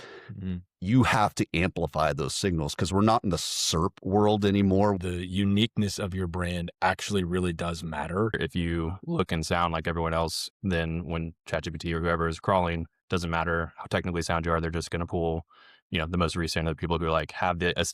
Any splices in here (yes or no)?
yes